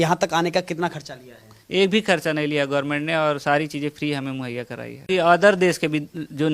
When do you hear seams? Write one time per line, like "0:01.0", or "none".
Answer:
0:05.1